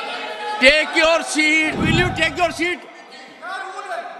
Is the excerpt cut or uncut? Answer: cut